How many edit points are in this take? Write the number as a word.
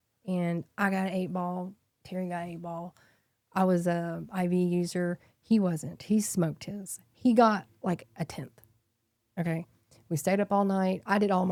zero